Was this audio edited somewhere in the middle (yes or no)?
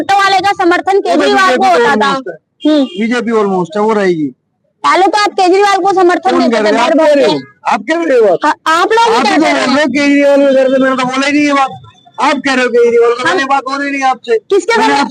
no